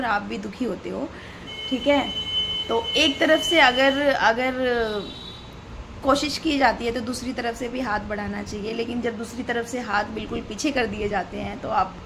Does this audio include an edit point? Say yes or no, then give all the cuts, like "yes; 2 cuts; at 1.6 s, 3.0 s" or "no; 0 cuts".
no; 0 cuts